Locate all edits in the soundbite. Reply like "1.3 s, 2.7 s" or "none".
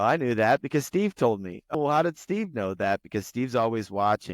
1.7 s